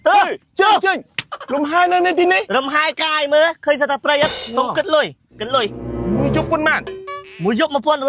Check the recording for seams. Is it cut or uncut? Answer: cut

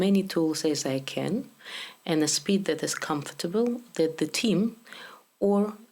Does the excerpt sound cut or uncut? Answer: uncut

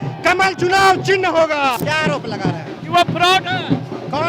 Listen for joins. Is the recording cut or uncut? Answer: cut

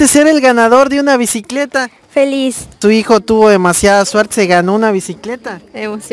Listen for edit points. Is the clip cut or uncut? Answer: cut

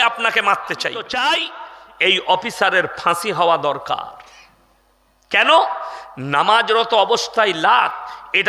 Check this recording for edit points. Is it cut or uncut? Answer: cut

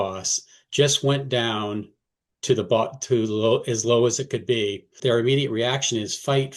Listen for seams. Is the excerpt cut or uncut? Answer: cut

